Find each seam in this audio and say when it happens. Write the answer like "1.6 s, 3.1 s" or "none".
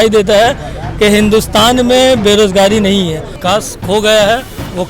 3.3 s